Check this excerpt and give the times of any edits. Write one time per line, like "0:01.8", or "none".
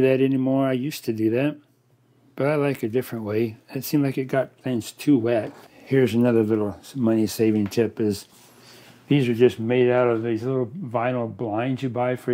0:05.5